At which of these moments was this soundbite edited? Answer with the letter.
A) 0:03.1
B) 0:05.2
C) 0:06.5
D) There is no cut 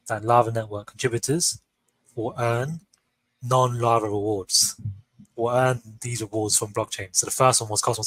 D